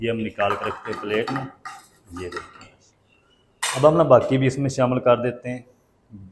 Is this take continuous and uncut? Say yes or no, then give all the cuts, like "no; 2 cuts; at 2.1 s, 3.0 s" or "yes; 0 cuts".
yes; 0 cuts